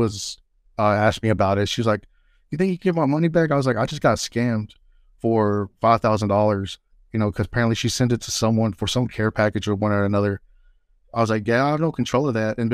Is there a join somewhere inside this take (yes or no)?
no